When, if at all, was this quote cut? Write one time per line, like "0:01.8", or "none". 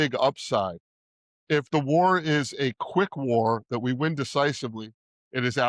none